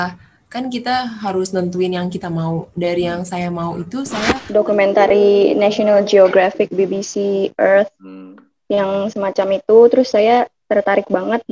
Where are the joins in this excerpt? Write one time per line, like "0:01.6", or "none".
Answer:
0:04.4